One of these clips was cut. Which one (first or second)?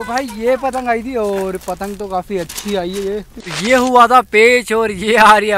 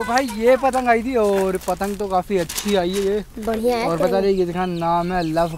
first